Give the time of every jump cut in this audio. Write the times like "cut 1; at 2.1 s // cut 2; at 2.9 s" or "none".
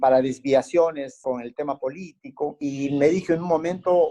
cut 1; at 1.1 s // cut 2; at 2.6 s